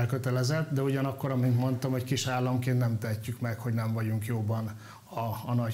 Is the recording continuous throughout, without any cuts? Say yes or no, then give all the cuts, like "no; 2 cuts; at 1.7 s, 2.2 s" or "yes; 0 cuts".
yes; 0 cuts